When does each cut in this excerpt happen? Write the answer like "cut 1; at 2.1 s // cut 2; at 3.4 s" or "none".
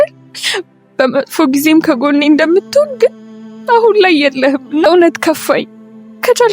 cut 1; at 4.9 s